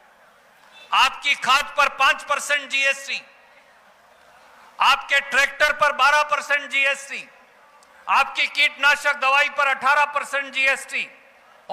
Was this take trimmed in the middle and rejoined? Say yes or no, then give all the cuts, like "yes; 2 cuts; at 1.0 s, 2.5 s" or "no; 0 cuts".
no; 0 cuts